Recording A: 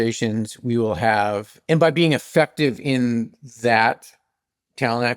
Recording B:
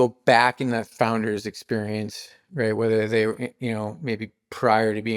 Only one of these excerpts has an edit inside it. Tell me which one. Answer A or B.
A